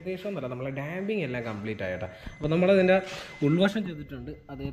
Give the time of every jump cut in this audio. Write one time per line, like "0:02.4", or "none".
none